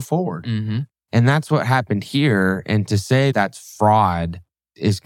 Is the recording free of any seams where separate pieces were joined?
yes; 0 cuts

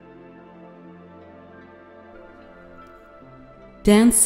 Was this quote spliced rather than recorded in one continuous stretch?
no; 0 cuts

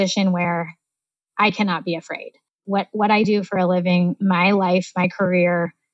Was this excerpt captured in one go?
no; 2 cuts; at 2.6 s, 4.2 s

